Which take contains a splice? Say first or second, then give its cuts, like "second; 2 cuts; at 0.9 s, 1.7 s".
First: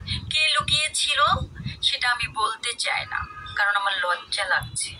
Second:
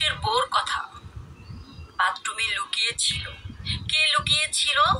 second; 1 cut; at 1.4 s